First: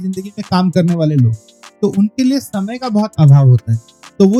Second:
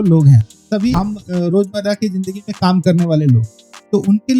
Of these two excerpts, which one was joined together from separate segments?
second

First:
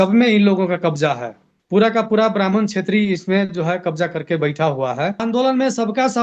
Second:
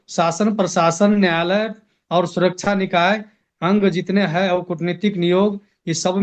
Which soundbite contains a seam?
first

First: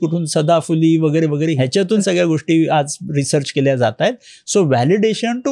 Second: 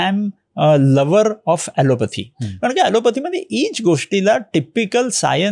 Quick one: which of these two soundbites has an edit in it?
first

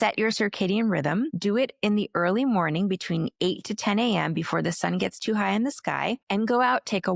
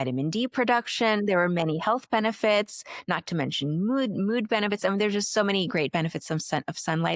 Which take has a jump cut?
first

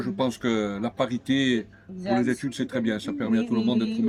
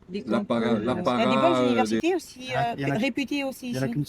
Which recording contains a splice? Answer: second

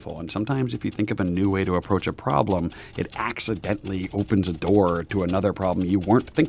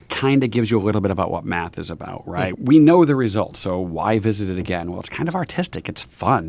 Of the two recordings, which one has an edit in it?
second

